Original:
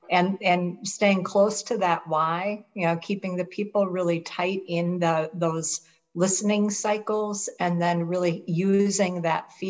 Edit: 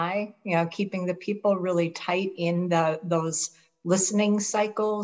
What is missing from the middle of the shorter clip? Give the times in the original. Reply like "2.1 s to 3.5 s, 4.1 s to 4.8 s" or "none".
none